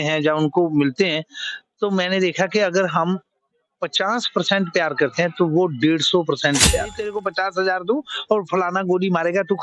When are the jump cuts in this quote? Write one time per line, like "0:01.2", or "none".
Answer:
0:07.1